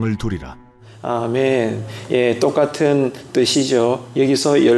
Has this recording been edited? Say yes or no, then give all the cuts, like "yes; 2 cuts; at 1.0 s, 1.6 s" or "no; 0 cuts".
no; 0 cuts